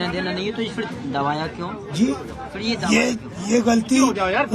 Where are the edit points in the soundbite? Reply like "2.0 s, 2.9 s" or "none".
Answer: none